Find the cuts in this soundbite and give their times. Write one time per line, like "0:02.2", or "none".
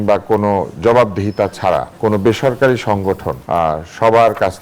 0:01.9
0:03.3